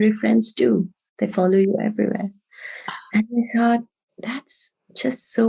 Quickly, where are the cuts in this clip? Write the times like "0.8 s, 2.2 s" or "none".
none